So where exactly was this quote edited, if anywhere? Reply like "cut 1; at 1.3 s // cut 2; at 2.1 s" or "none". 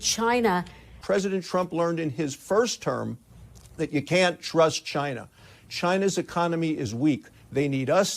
cut 1; at 0.9 s